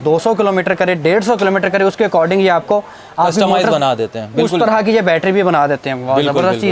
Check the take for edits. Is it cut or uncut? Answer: uncut